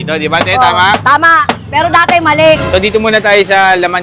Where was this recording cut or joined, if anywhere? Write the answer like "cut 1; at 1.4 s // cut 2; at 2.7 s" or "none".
cut 1; at 2.6 s

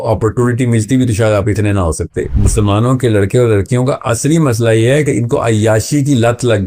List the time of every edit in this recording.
cut 1; at 2.3 s

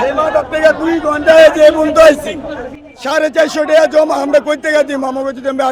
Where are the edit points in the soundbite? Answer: none

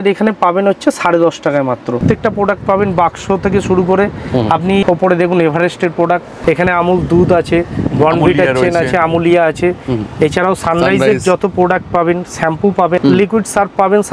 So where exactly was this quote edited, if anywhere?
cut 1; at 2.0 s // cut 2; at 4.8 s // cut 3; at 6.3 s // cut 4; at 13.0 s

